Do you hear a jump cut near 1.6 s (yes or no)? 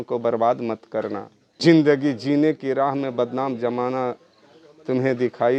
yes